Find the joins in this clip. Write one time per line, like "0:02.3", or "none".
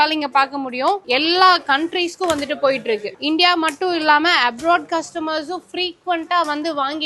0:01.0
0:03.1